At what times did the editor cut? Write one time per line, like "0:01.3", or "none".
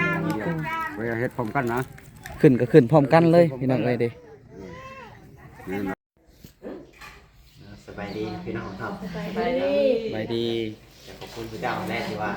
0:05.9